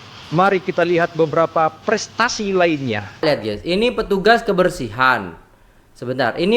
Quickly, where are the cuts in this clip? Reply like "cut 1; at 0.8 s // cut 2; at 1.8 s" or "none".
cut 1; at 3.2 s